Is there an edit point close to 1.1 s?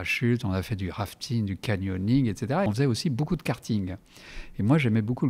no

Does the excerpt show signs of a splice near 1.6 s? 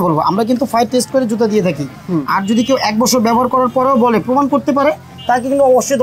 no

